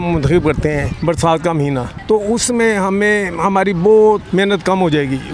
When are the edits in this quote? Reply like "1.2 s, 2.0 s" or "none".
1.0 s, 1.9 s, 4.2 s